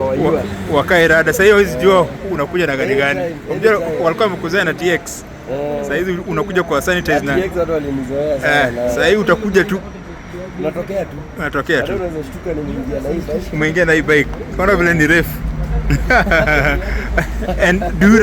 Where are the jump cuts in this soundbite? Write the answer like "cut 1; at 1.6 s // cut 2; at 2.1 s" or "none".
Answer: none